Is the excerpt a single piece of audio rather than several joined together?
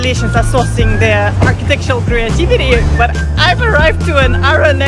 yes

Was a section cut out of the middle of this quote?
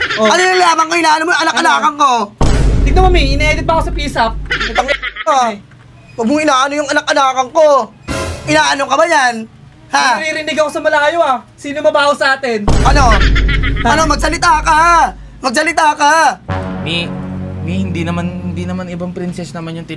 no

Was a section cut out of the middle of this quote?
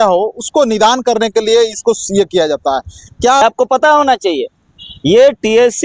yes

